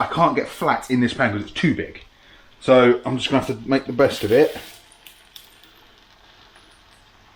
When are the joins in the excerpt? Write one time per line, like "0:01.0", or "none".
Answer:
none